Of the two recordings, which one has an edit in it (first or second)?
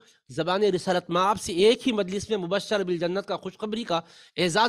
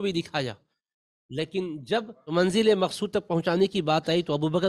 second